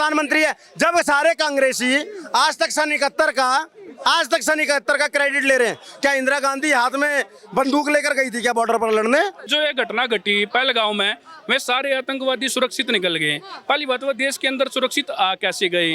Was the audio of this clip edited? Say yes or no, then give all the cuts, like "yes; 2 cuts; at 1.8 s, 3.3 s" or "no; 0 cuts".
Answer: yes; 1 cut; at 9.4 s